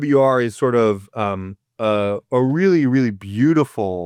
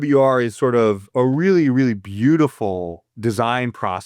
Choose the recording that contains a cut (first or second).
second